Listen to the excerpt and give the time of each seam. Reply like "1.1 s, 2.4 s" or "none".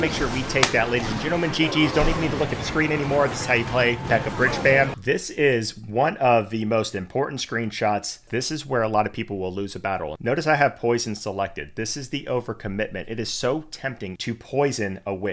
5.0 s, 8.3 s, 10.1 s, 14.1 s